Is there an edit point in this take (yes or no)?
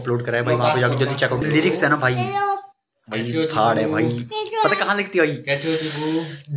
yes